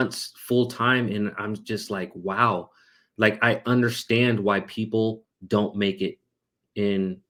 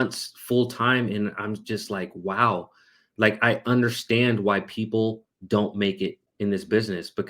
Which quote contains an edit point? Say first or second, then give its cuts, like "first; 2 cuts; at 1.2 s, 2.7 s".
second; 1 cut; at 6.2 s